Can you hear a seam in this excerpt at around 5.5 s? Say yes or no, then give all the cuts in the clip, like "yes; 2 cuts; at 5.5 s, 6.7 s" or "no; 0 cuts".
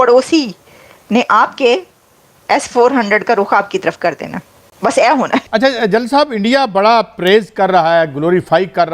yes; 1 cut; at 5.5 s